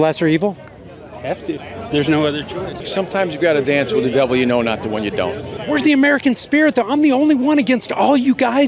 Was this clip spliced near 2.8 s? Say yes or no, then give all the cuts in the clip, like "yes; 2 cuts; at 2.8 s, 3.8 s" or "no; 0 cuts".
yes; 2 cuts; at 2.8 s, 5.5 s